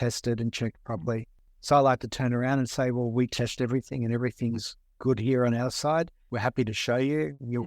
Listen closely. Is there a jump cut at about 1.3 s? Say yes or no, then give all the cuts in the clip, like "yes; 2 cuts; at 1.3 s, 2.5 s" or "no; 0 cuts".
yes; 1 cut; at 1.3 s